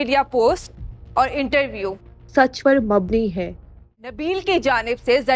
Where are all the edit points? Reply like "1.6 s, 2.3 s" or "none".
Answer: 4.2 s